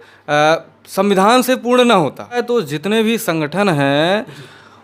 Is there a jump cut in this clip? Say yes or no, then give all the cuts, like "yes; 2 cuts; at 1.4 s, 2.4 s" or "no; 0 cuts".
yes; 1 cut; at 2.4 s